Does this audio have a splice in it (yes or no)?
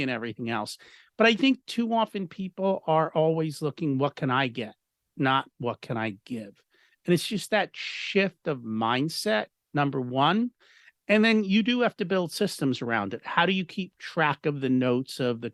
no